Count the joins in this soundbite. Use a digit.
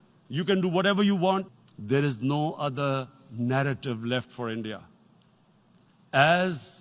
1